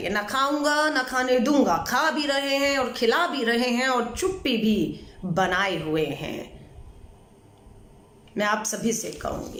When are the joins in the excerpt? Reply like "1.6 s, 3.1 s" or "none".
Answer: none

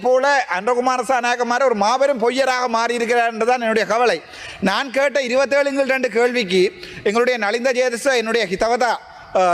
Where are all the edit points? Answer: none

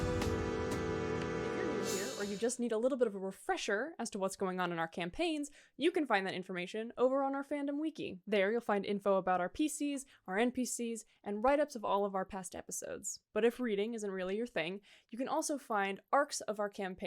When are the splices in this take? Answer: 1.9 s

